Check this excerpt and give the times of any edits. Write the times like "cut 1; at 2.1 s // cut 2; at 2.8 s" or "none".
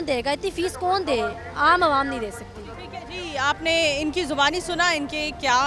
none